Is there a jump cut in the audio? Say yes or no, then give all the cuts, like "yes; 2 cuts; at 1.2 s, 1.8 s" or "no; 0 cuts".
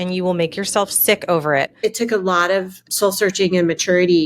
yes; 2 cuts; at 1.8 s, 2.9 s